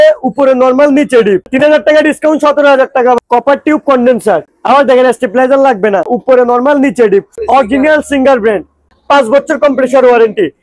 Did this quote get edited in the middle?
yes; 5 cuts; at 1.5 s, 3.2 s, 6.2 s, 7.3 s, 8.9 s

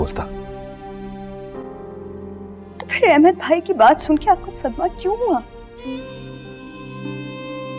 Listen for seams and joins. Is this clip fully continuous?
no; 1 cut; at 5.6 s

